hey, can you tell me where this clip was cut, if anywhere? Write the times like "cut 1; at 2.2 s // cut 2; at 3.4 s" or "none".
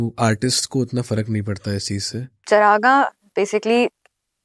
cut 1; at 2.4 s

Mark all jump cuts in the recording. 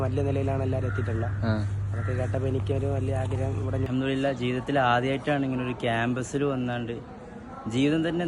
cut 1; at 3.9 s

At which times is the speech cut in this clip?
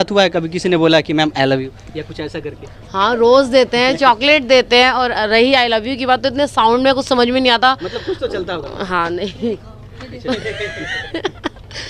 none

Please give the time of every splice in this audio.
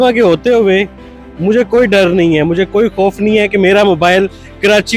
none

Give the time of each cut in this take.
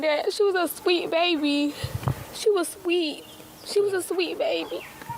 none

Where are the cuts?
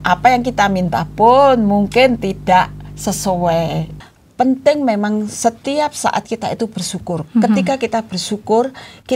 cut 1; at 3.9 s

